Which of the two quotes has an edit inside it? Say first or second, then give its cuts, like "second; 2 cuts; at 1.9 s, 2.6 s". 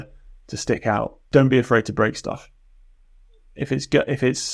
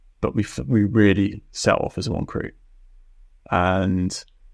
first; 1 cut; at 1.2 s